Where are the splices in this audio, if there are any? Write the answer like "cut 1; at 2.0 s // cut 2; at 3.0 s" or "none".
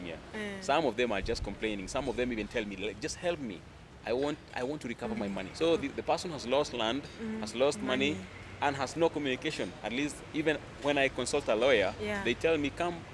cut 1; at 5.4 s